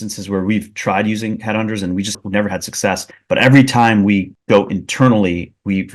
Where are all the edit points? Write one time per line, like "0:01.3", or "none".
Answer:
0:02.1